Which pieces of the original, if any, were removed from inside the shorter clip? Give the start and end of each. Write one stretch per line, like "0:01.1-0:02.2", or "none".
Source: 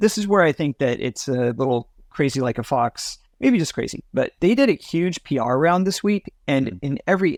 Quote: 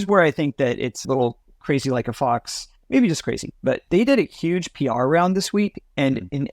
0:01.2-0:01.5